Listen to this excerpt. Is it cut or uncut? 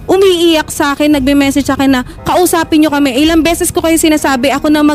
uncut